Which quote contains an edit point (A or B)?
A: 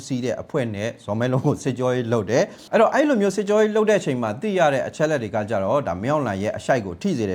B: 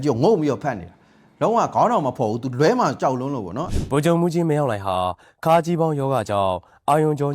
B